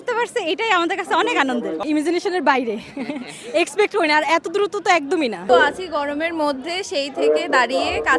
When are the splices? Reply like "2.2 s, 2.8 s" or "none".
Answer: 1.8 s, 5.5 s